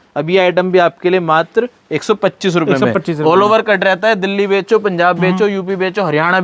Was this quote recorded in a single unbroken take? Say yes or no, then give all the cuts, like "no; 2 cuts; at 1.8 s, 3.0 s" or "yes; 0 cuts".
yes; 0 cuts